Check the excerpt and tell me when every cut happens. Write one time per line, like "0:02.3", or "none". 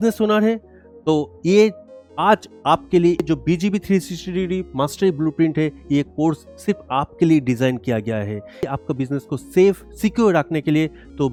none